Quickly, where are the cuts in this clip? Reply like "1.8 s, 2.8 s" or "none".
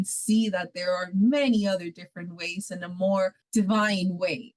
3.4 s